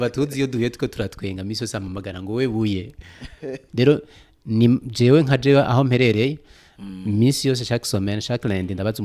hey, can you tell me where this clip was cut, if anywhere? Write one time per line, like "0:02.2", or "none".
0:03.6